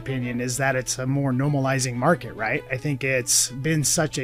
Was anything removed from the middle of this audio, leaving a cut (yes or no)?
no